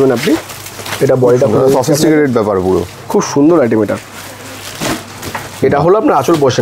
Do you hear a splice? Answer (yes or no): no